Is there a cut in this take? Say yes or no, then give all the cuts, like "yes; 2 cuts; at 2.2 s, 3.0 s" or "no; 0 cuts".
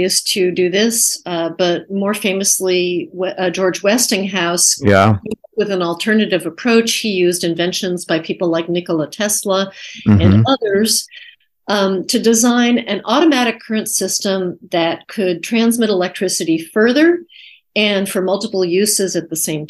no; 0 cuts